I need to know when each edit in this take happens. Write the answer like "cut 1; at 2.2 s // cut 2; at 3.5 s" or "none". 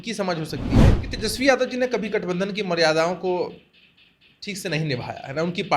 cut 1; at 1.0 s